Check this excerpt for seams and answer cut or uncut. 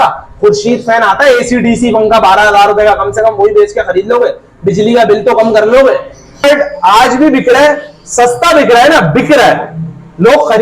cut